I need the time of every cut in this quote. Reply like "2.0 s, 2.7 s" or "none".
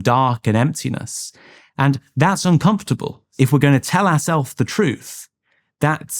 3.2 s